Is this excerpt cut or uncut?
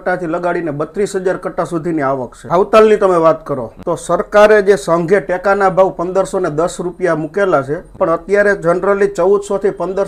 uncut